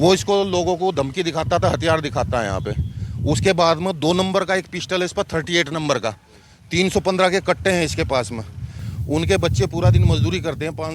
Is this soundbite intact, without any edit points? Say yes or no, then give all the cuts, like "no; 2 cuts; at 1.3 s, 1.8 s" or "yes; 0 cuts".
no; 1 cut; at 8.8 s